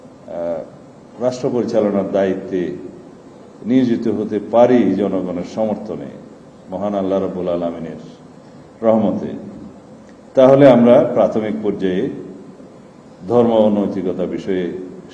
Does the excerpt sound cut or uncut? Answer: uncut